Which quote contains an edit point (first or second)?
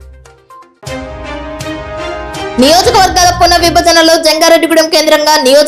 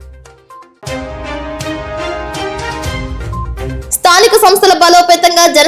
second